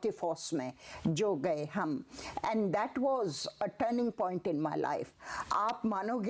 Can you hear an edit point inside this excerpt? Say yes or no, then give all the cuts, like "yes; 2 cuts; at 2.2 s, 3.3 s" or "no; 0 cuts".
yes; 1 cut; at 5.1 s